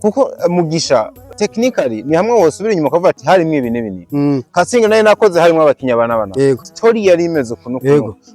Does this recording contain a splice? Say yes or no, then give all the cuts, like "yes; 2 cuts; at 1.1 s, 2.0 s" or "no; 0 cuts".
yes; 1 cut; at 1.2 s